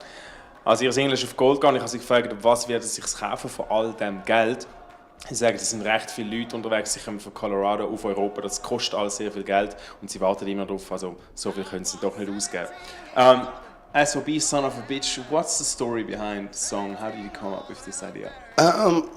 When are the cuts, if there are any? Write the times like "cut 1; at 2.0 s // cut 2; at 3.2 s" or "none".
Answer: cut 1; at 16.5 s